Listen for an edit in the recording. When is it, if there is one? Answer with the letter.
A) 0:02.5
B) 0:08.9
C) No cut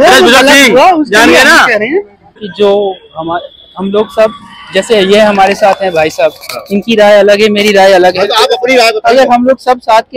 A